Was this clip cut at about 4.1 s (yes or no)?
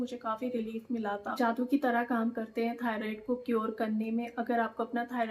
no